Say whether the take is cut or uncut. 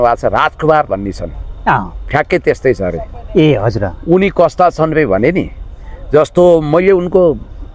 uncut